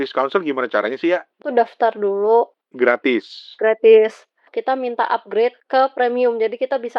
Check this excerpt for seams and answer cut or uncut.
cut